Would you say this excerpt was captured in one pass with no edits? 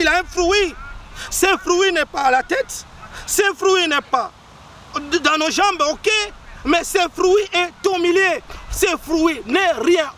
yes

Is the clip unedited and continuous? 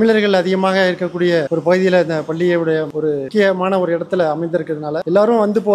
yes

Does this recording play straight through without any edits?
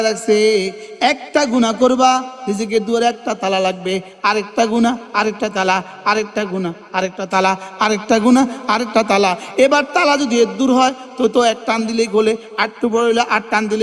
yes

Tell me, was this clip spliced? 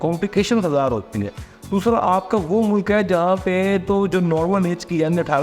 no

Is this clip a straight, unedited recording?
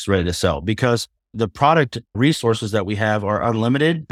yes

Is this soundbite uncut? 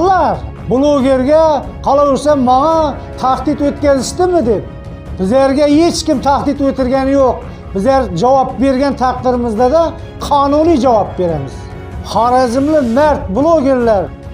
yes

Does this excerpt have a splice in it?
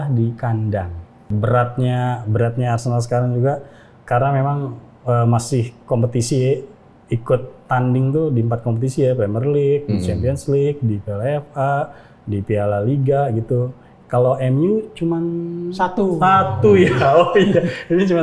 yes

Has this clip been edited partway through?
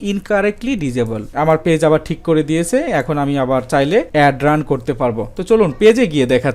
yes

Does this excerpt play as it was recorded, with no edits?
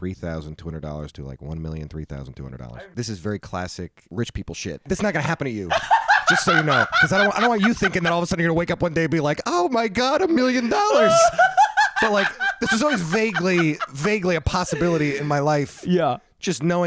no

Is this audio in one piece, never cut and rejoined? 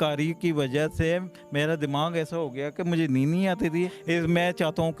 no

